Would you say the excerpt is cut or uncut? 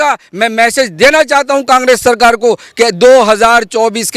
uncut